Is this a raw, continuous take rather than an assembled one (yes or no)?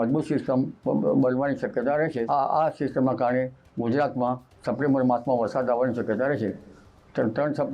no